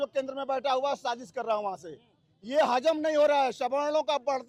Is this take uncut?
yes; 0 cuts

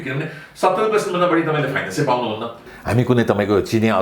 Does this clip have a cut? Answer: yes; 1 cut; at 2.7 s

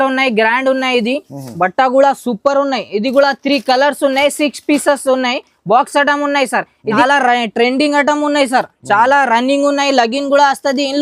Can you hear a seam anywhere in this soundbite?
yes; 1 cut; at 7.0 s

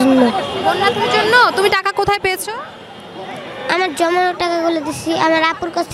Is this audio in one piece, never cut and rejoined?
yes; 0 cuts

